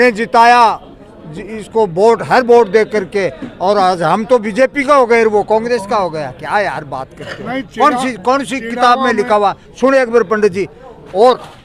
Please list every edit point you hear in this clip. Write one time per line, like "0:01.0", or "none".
none